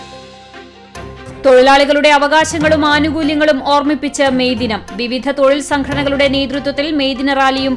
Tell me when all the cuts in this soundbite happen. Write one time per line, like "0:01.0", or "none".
0:01.3